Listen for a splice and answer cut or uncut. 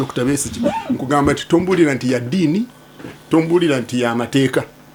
uncut